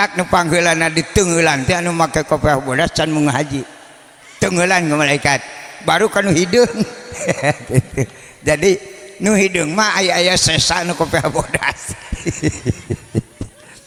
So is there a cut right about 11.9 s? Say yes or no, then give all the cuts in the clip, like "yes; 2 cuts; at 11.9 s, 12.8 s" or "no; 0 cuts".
no; 0 cuts